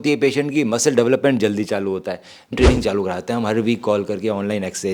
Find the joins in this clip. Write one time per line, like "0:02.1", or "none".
0:02.5